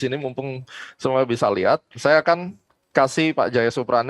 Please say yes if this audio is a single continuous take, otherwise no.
yes